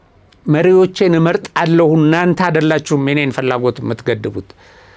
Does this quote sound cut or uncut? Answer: uncut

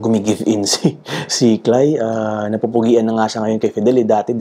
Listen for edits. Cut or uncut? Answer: uncut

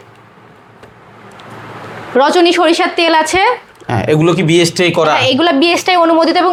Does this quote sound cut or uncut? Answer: uncut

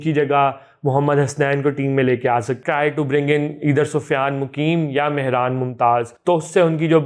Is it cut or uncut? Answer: cut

